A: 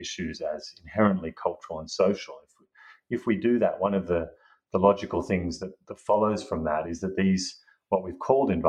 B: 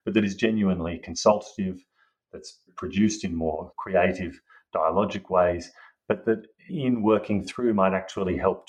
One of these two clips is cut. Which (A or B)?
B